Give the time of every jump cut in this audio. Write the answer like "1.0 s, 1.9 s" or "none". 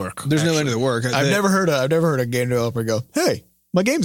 none